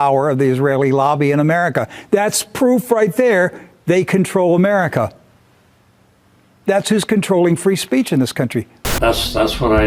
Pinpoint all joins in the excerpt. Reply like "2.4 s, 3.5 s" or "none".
8.8 s

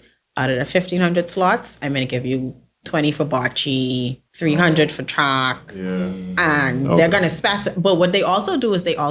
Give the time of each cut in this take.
4.2 s

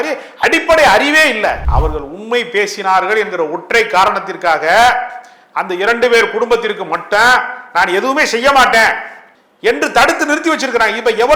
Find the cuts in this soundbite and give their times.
1.6 s

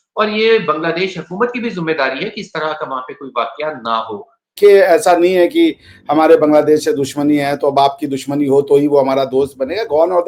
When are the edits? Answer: 4.6 s

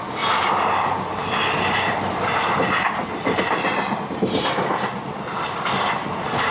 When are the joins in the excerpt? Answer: none

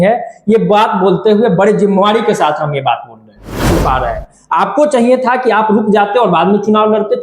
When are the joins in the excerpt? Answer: 3.8 s

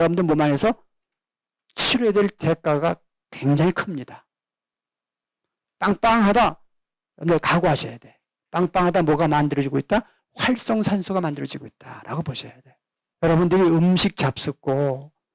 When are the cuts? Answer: 13.0 s

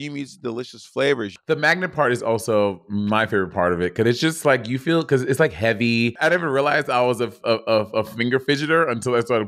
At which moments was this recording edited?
1.4 s, 6.2 s

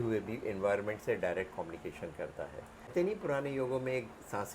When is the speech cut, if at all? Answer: 2.9 s

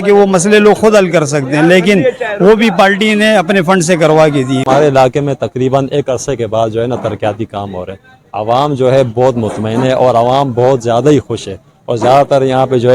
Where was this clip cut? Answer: 4.6 s

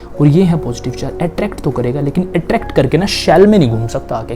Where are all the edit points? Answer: none

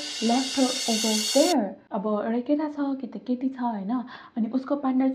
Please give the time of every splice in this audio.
1.8 s

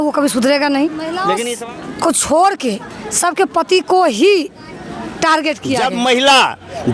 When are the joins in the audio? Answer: 1.3 s, 5.8 s

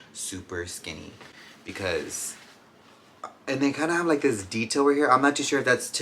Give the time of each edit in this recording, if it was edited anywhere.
none

